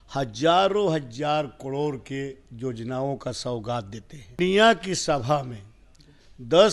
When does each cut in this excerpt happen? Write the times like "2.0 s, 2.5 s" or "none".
4.4 s